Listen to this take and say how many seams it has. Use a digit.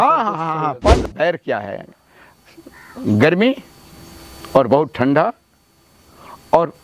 1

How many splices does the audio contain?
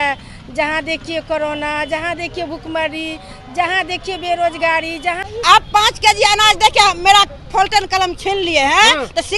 1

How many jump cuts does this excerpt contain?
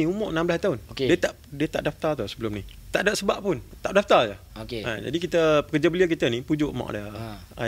2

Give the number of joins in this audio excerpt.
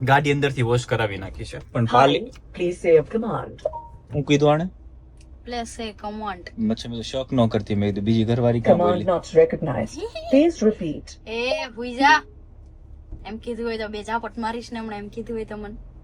0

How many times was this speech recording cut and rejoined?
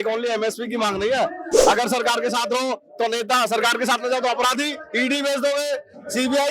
1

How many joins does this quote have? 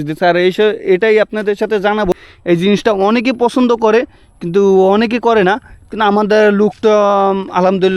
1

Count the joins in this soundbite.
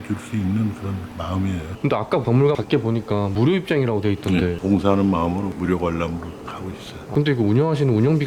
3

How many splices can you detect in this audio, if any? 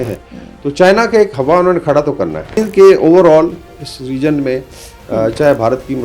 1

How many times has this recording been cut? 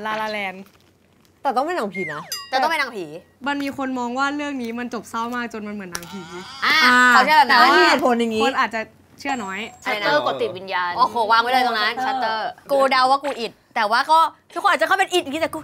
3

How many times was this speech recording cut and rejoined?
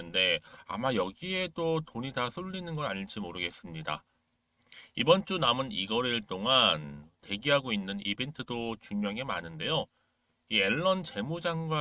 0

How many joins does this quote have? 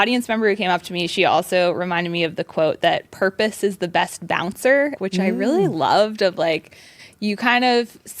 1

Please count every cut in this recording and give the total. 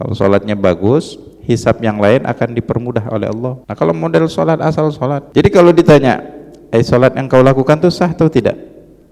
2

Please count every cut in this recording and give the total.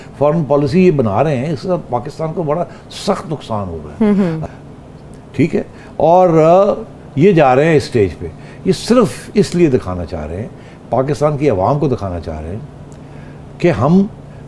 0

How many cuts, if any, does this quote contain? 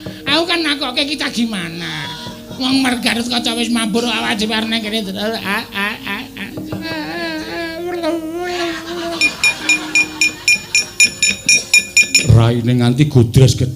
1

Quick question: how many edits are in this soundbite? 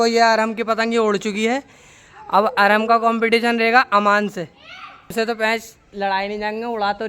1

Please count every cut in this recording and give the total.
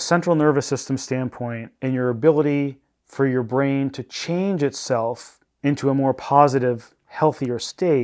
1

